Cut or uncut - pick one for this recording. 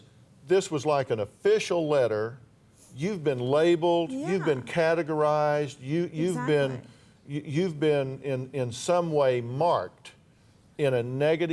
uncut